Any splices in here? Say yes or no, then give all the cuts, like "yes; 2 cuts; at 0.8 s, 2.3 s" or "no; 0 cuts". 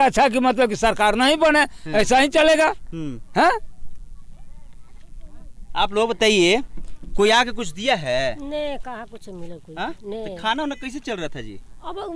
no; 0 cuts